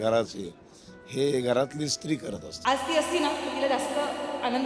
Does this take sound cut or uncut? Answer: cut